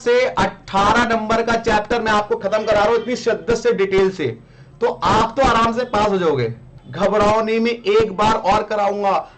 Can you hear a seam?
yes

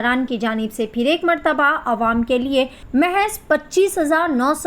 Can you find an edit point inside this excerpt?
yes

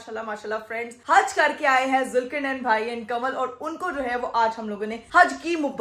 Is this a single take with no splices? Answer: yes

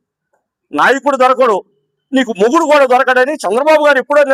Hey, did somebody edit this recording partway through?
no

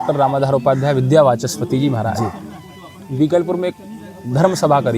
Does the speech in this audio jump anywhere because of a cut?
no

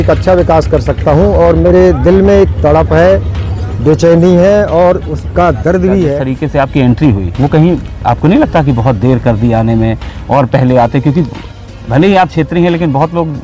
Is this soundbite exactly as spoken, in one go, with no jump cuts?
no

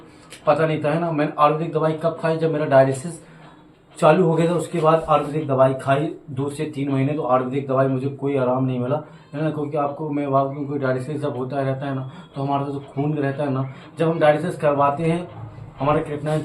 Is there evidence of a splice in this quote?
no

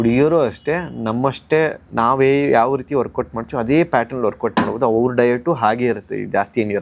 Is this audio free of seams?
yes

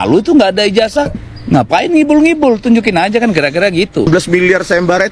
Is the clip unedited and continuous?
no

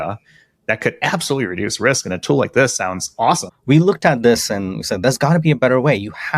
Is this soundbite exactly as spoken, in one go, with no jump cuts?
no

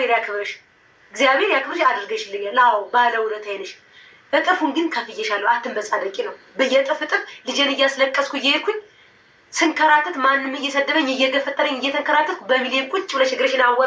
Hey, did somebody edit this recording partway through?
no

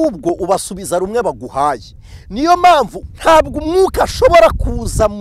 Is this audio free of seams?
no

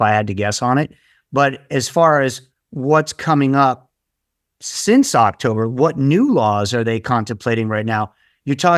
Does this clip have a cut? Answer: no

